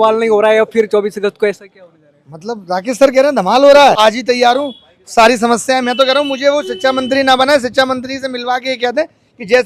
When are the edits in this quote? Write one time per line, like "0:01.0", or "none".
0:04.0